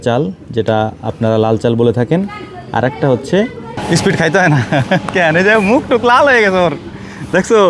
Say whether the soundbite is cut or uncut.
cut